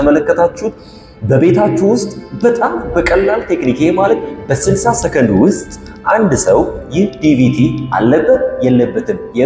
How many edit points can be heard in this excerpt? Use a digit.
0